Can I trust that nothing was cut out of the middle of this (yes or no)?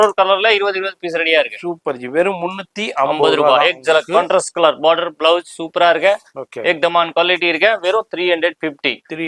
yes